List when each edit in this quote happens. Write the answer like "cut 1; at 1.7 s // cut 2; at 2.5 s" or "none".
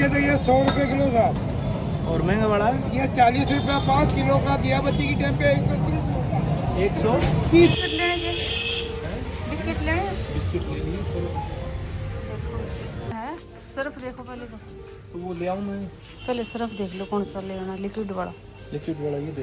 none